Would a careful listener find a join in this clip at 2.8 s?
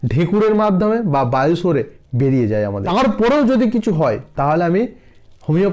yes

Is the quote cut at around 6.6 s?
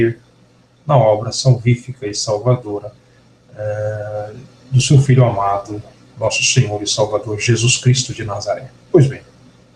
no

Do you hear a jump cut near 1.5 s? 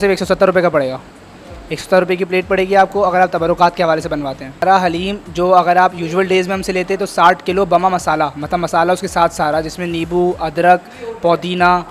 no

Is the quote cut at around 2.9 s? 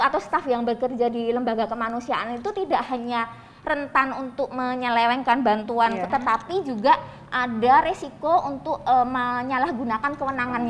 no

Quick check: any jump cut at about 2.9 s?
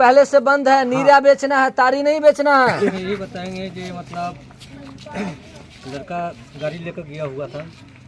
yes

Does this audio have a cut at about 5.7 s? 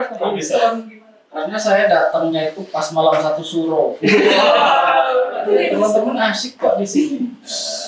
yes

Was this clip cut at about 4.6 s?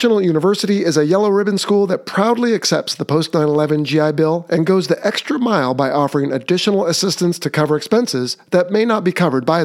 no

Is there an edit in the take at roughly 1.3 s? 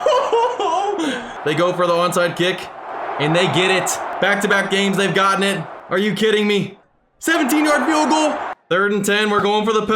yes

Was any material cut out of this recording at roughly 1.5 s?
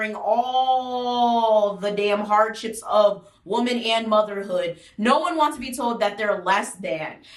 no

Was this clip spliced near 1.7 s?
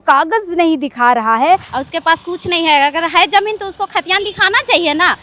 yes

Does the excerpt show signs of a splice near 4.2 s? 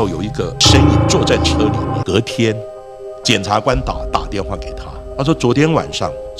no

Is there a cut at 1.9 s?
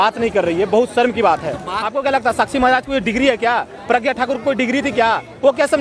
yes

